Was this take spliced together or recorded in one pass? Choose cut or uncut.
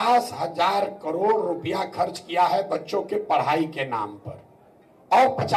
uncut